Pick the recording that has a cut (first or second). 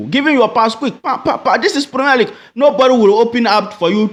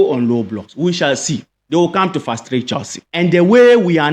second